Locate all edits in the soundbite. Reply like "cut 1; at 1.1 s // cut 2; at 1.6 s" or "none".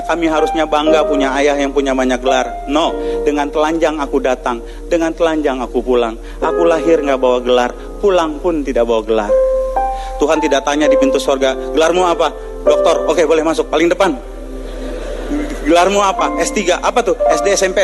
none